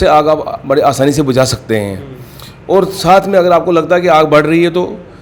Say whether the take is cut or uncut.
uncut